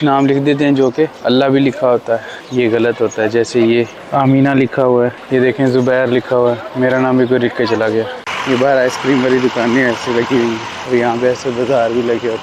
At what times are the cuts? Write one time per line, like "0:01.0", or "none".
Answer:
0:01.2
0:02.4
0:04.0
0:05.2
0:08.3
0:10.7